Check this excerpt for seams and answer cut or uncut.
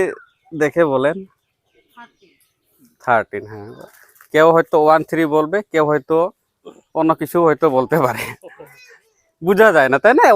cut